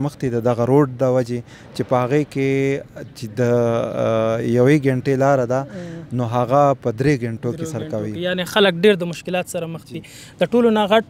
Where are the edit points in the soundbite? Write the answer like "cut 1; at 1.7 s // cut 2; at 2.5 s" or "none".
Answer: none